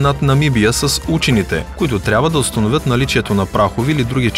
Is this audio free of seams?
no; 1 cut; at 1.7 s

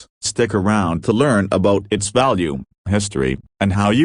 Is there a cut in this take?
no; 0 cuts

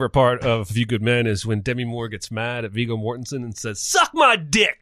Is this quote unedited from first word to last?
yes; 0 cuts

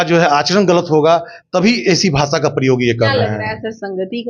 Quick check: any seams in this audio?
no; 0 cuts

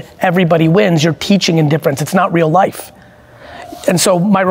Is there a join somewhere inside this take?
no; 0 cuts

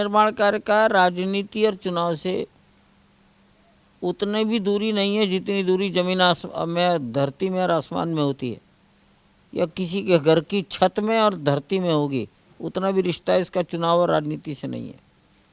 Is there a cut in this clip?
no; 0 cuts

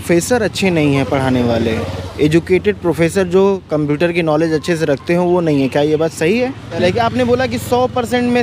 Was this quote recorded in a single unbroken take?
no; 1 cut; at 6.8 s

